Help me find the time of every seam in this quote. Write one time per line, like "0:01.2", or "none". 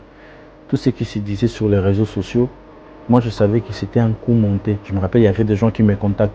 0:04.9

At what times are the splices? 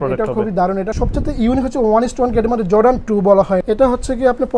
0:00.9
0:03.6

